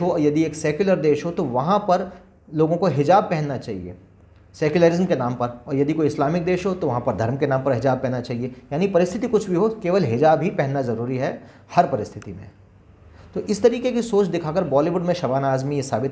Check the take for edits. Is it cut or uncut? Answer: uncut